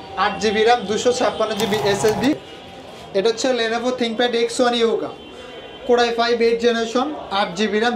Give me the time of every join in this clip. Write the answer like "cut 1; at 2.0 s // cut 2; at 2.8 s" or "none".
cut 1; at 2.5 s